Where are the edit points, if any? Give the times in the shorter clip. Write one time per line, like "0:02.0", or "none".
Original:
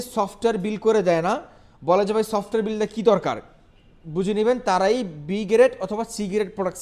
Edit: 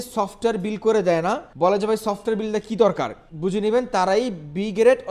0:01.5
0:03.2